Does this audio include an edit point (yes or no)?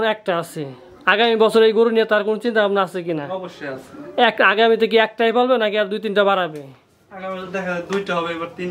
no